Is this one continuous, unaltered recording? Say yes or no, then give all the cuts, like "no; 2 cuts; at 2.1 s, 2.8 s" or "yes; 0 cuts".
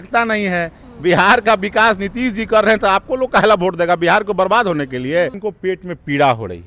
no; 1 cut; at 5.4 s